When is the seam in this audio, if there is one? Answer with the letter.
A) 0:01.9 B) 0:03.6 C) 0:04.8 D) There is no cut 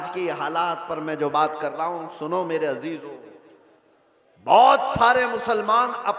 D